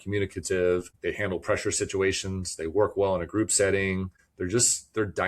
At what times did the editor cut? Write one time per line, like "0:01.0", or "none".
0:00.9
0:04.2